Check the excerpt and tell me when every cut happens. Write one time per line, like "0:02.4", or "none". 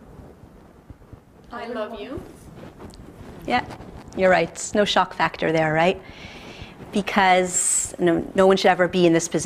0:07.3